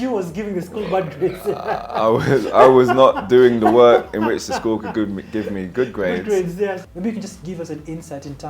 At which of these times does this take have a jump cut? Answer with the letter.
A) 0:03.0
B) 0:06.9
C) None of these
B